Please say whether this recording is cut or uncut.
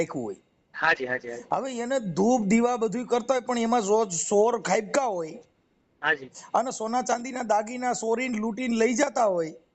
uncut